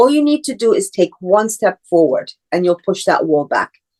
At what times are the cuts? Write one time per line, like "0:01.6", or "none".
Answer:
none